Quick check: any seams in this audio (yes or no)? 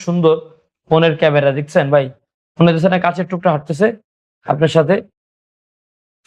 no